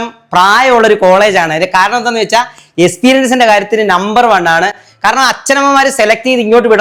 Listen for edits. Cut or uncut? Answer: uncut